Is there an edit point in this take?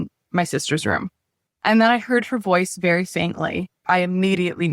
yes; 2 cuts; at 1.5 s, 3.8 s

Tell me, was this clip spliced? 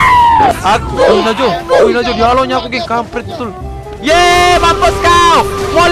no; 0 cuts

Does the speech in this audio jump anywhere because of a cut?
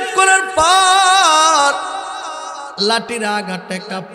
no; 0 cuts

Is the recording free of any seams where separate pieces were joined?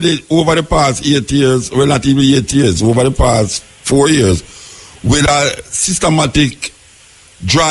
yes; 0 cuts

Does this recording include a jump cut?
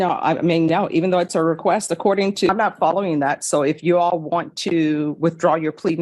yes; 1 cut; at 2.5 s

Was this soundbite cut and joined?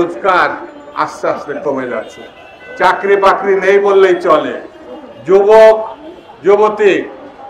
no; 0 cuts

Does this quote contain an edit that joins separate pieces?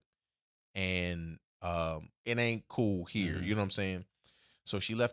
yes; 1 cut; at 2.1 s

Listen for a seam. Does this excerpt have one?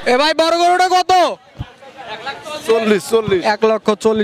no; 0 cuts

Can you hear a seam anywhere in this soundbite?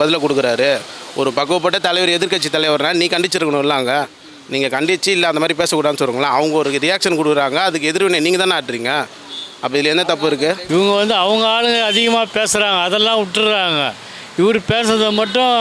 yes; 1 cut; at 10.6 s

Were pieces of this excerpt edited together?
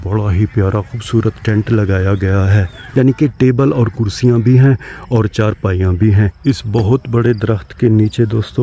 yes; 2 cuts; at 2.7 s, 6.4 s

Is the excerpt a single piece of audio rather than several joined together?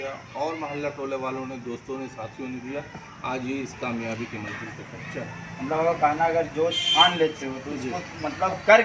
yes; 0 cuts

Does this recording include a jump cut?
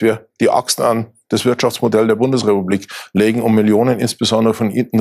no; 0 cuts

